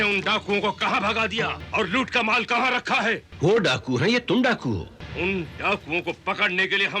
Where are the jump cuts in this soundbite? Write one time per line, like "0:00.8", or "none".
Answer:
0:01.6
0:03.3
0:05.0